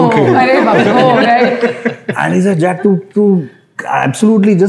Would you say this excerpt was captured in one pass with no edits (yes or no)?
yes